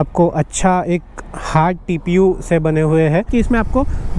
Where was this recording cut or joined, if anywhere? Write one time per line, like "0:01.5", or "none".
0:03.3